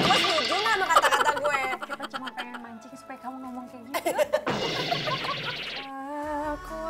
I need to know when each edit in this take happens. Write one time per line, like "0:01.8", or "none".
0:05.7